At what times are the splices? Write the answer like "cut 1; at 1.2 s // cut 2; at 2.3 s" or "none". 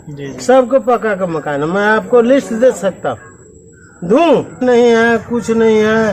cut 1; at 4.6 s